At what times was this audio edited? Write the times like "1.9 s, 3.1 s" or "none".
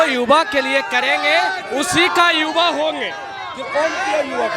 none